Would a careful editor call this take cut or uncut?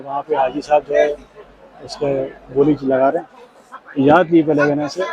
uncut